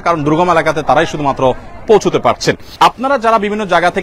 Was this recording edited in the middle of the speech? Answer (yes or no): yes